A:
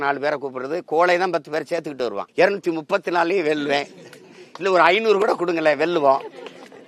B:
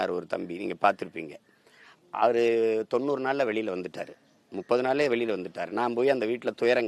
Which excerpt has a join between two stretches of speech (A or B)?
A